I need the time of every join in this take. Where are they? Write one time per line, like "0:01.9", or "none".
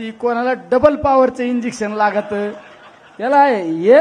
none

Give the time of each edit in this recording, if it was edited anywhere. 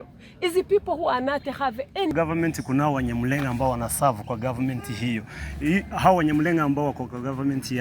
0:02.1

